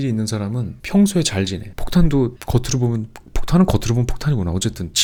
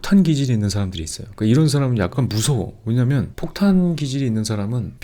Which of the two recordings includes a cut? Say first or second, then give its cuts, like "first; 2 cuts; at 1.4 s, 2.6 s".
second; 1 cut; at 2.1 s